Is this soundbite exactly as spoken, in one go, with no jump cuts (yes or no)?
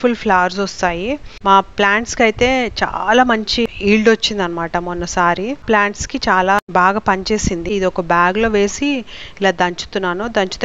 no